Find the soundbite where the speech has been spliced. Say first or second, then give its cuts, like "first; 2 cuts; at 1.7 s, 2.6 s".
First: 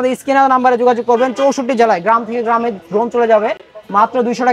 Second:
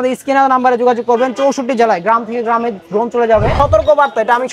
second; 1 cut; at 3.5 s